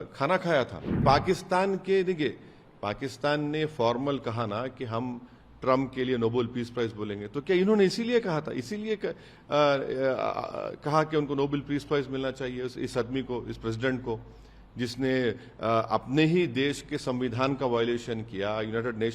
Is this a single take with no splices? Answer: no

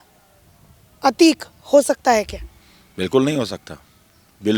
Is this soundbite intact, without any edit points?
yes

